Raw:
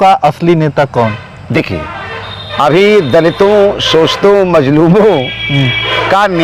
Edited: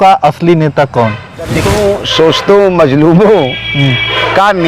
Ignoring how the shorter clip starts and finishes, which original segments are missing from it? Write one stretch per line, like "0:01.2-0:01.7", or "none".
0:01.7-0:03.4